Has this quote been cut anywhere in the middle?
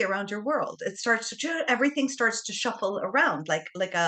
no; 0 cuts

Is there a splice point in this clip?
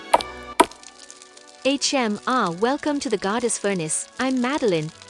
yes; 1 cut; at 1.0 s

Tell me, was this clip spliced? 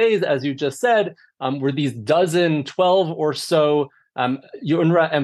no; 0 cuts

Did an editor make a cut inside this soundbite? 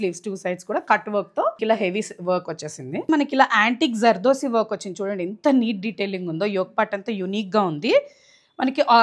yes; 2 cuts; at 1.6 s, 3.0 s

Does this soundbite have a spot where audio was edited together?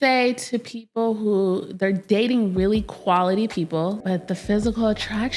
yes; 1 cut; at 4.0 s

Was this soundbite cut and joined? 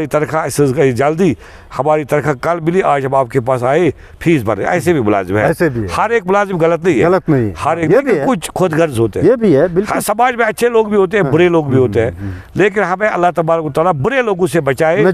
no; 0 cuts

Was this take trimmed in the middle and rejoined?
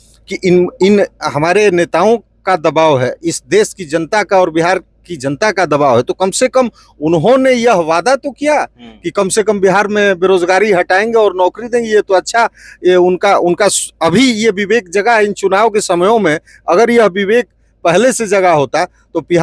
no; 0 cuts

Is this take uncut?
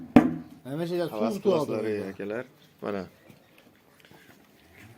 yes; 0 cuts

